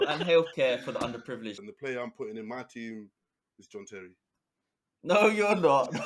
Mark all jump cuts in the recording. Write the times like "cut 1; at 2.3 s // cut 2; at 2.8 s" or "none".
cut 1; at 1.6 s